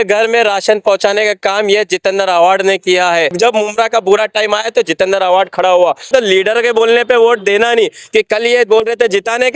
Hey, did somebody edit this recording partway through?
yes; 2 cuts; at 3.3 s, 6.1 s

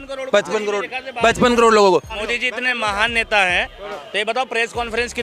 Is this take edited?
yes; 1 cut; at 2.1 s

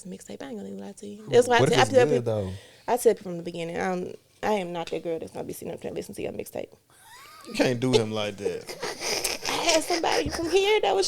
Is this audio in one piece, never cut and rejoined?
yes; 0 cuts

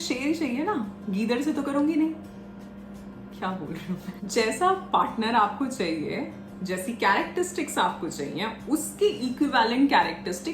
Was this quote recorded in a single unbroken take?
no; 1 cut; at 4.3 s

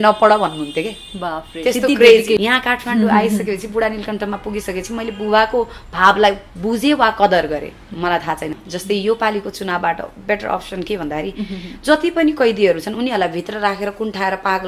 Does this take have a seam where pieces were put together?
yes; 2 cuts; at 2.4 s, 8.6 s

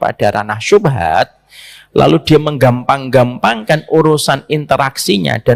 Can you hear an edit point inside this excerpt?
no; 0 cuts

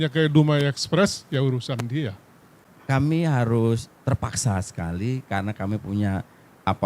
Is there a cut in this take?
yes; 1 cut; at 2.7 s

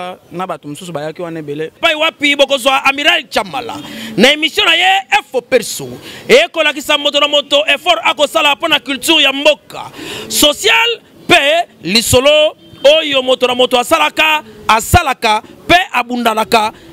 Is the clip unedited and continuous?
no; 1 cut; at 1.7 s

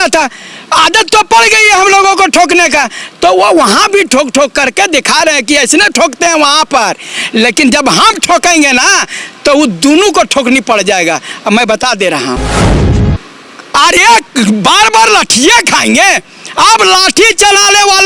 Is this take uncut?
no; 1 cut; at 12.9 s

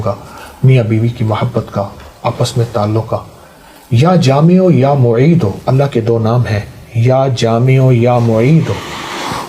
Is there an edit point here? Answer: no; 0 cuts

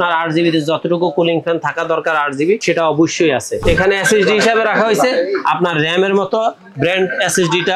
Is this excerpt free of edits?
no; 2 cuts; at 2.6 s, 3.6 s

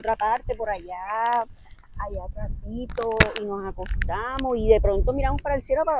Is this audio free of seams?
yes; 0 cuts

